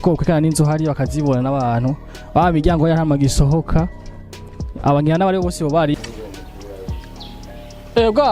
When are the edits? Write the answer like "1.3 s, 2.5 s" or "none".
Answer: 5.9 s